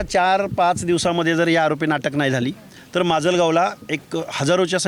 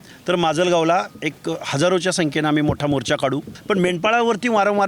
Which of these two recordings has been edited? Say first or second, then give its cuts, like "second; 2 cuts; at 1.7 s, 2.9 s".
second; 1 cut; at 3.5 s